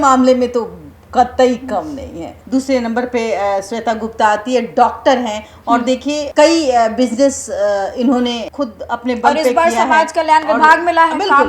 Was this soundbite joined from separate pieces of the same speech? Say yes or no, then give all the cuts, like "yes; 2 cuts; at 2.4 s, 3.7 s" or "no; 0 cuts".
yes; 2 cuts; at 2.3 s, 8.5 s